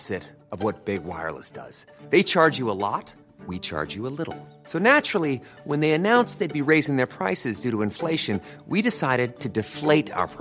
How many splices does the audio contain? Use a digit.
0